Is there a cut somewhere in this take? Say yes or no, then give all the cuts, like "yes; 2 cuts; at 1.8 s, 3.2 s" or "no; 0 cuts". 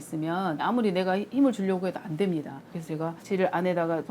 yes; 1 cut; at 2.6 s